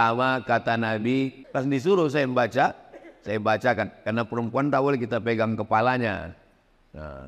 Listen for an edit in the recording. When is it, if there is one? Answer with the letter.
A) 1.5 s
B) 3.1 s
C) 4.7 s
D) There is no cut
A